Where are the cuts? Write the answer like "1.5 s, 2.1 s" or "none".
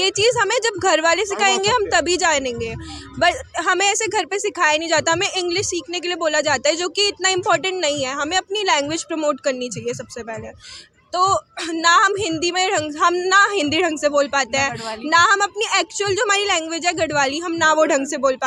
none